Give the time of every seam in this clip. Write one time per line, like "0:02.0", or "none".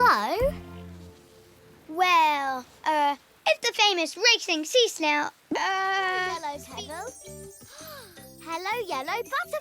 0:06.3